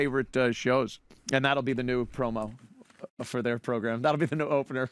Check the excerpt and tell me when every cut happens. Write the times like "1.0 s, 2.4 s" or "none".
0.9 s